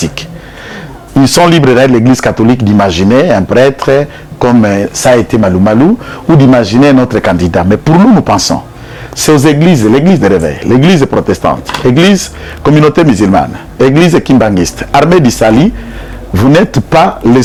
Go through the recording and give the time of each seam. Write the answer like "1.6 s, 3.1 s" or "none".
none